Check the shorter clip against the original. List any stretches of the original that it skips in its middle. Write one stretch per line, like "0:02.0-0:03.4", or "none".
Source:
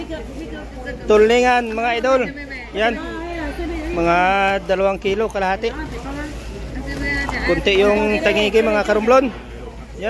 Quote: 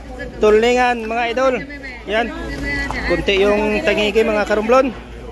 0:03.1-0:06.8